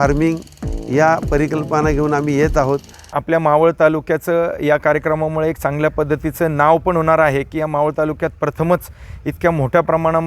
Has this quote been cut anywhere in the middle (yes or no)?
yes